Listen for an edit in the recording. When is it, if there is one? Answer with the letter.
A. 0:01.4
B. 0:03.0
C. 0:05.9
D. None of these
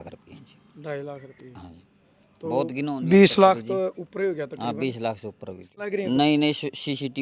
C